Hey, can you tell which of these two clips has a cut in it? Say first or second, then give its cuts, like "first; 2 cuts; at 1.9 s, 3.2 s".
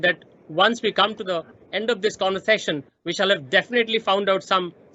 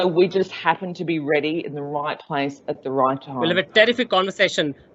second; 1 cut; at 3.3 s